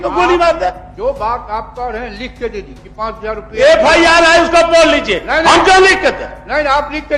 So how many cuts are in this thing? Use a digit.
1